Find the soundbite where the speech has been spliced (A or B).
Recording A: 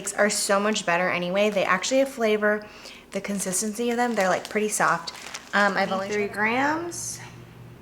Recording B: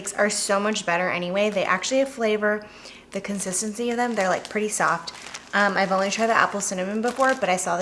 A